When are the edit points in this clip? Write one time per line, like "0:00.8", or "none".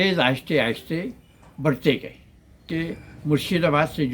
0:02.7